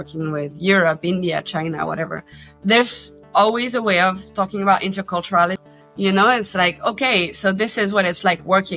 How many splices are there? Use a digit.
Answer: 1